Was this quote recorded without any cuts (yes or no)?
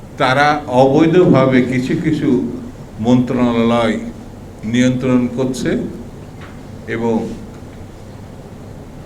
yes